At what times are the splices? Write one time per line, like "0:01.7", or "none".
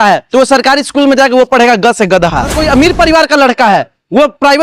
0:02.6

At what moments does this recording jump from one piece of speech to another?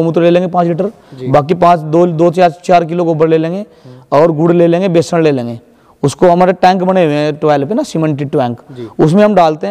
none

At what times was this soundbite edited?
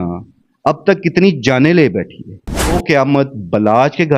0:02.7

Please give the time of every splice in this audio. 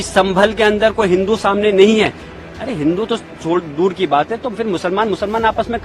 none

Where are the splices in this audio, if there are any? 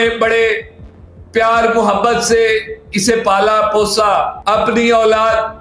0:04.3

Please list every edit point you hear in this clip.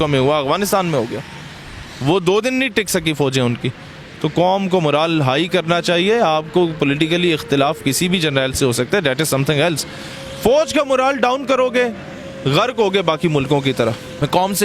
none

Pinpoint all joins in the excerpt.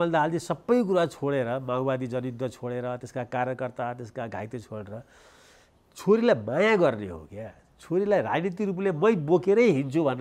none

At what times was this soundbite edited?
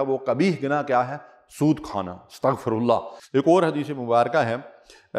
0:03.2

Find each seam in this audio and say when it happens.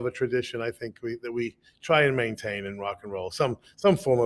none

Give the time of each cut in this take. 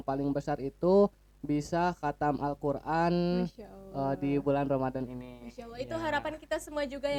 none

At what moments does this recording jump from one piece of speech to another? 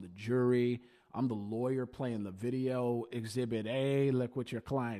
none

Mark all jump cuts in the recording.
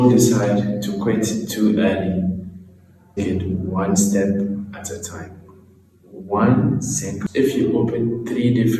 0:03.2
0:07.2

